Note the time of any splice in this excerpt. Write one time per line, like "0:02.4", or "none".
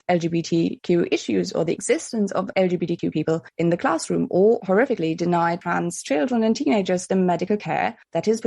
none